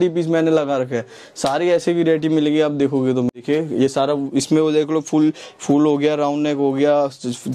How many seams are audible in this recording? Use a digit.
1